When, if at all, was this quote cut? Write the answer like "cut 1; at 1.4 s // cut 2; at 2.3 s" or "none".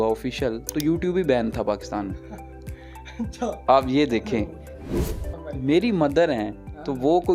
cut 1; at 4.9 s